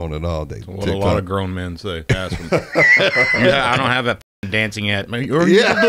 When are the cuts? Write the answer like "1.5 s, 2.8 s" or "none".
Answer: 2.0 s